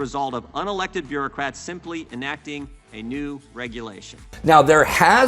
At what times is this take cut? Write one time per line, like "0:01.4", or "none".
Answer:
0:04.2